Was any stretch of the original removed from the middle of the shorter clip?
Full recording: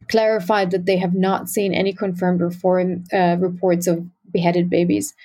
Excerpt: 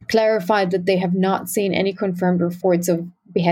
yes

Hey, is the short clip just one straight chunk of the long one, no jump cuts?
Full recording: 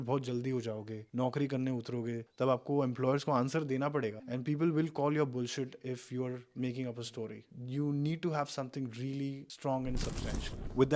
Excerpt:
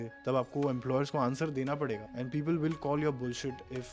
yes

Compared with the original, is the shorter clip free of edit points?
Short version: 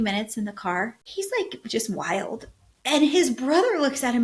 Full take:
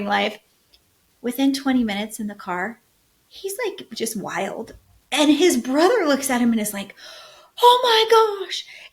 no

